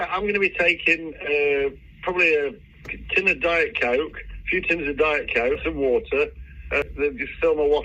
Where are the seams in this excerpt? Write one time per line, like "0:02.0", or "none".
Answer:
0:05.6
0:06.8